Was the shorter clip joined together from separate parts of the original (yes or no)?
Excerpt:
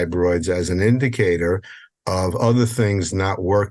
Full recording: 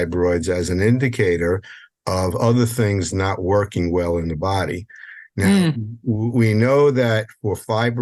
no